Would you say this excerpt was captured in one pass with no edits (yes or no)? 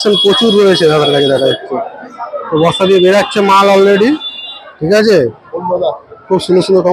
yes